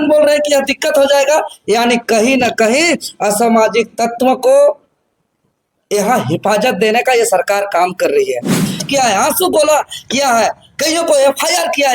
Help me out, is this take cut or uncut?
cut